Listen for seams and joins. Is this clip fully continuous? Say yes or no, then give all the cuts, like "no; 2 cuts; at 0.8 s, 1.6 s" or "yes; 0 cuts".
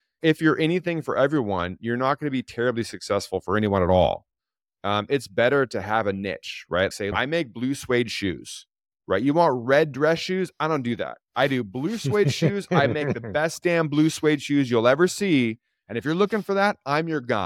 no; 1 cut; at 7.1 s